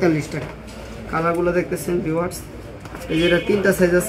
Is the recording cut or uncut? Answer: uncut